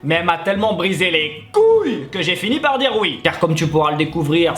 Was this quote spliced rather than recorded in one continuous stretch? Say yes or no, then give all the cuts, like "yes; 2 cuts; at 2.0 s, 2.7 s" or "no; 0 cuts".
no; 0 cuts